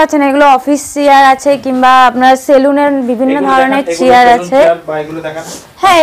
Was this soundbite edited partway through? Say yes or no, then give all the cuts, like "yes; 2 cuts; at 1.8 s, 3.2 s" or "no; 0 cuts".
no; 0 cuts